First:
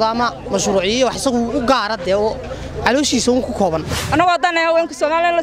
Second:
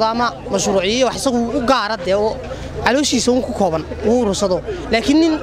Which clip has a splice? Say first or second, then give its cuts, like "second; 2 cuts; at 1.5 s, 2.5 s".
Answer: first; 1 cut; at 3.9 s